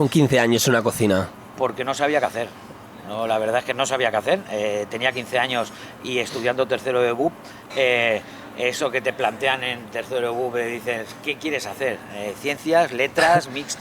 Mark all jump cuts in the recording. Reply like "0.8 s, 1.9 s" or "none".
none